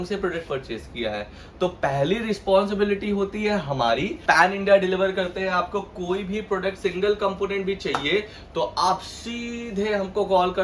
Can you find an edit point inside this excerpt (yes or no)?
yes